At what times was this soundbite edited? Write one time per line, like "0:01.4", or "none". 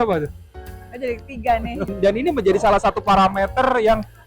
0:01.9

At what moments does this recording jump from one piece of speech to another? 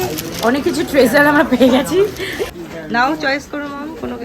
0:02.5

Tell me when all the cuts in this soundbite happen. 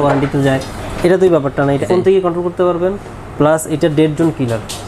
0:01.8

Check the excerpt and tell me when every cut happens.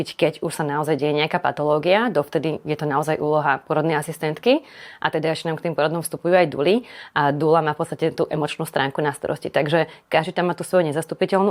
none

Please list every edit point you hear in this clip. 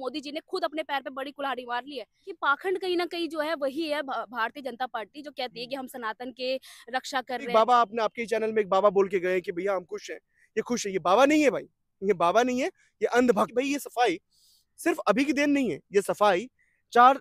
0:02.4
0:07.5
0:13.5

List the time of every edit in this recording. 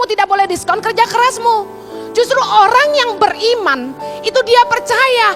none

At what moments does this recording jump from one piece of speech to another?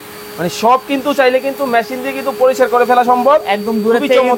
none

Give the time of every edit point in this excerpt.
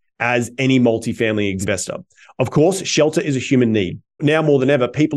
0:01.6
0:04.0

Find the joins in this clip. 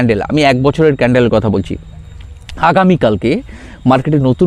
none

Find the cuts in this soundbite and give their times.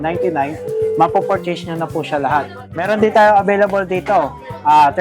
0:02.8

